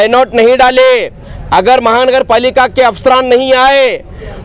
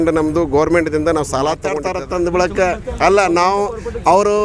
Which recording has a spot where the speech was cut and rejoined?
second; 1 cut; at 1.7 s

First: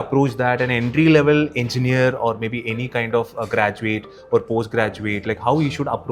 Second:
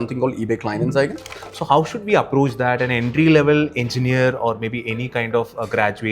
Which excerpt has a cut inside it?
second; 1 cut; at 1.3 s

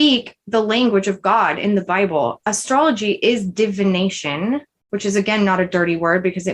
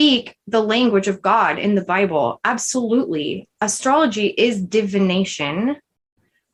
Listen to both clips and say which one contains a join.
first; 2 cuts; at 2.4 s, 4.8 s

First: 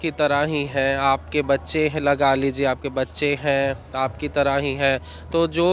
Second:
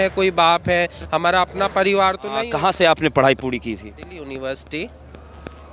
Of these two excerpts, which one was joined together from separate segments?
second; 1 cut; at 2.4 s

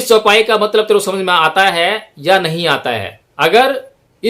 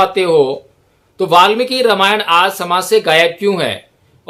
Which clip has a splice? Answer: first; 1 cut; at 3.2 s

